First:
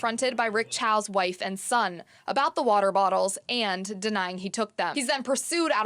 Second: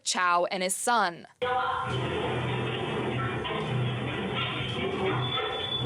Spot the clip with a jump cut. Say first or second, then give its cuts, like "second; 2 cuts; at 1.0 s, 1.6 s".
first; 1 cut; at 4.9 s